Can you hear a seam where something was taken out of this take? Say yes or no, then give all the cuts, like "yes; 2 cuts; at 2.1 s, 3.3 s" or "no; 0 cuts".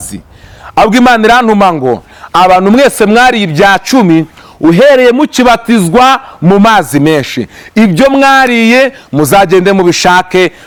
no; 0 cuts